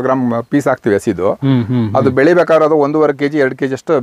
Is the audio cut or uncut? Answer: uncut